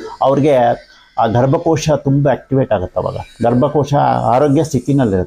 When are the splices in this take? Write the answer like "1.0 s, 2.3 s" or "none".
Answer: none